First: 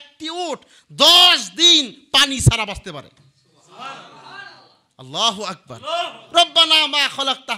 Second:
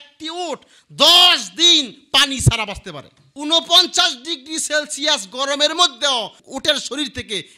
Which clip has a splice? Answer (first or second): second